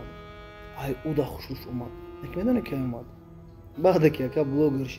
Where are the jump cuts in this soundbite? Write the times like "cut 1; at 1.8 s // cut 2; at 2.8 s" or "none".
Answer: none